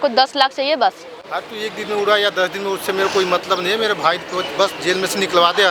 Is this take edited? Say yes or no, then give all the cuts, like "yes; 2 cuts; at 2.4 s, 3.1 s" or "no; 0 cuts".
no; 0 cuts